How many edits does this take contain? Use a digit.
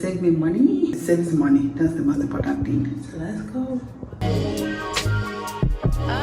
2